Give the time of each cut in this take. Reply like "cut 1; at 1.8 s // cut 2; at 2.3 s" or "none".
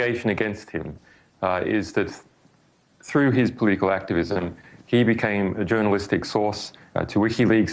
cut 1; at 3.8 s